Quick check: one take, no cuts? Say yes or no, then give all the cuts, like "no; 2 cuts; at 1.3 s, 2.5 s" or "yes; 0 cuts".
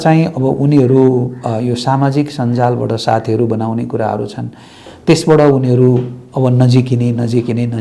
yes; 0 cuts